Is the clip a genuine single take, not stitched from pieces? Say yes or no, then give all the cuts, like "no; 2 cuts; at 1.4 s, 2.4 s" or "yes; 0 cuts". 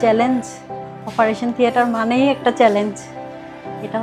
yes; 0 cuts